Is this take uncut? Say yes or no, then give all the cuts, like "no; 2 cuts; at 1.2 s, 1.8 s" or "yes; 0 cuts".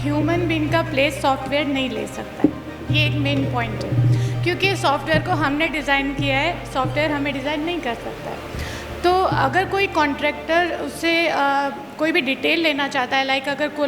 yes; 0 cuts